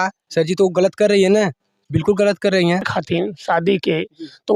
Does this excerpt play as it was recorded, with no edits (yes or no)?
no